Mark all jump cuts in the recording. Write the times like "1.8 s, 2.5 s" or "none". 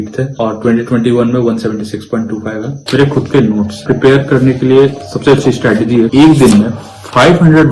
2.8 s, 3.8 s, 6.1 s

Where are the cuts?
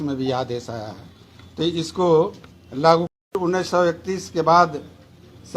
3.4 s

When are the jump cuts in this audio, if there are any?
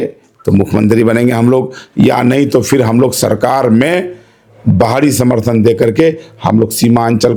none

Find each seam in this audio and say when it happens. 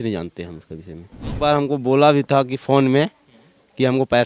1.3 s

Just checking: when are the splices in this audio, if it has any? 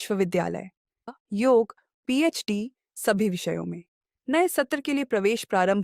1.1 s

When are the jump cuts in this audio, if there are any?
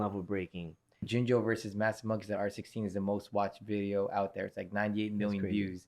0.9 s

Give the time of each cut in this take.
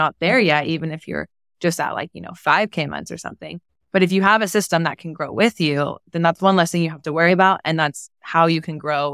none

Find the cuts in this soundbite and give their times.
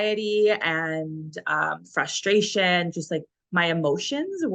none

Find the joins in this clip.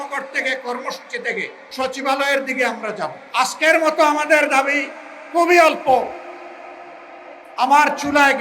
1.6 s, 3.2 s

